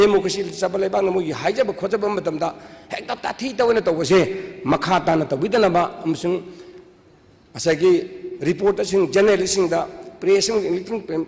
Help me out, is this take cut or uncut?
uncut